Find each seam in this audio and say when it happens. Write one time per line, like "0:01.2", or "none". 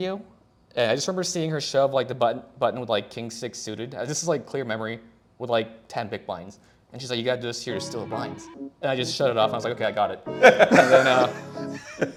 none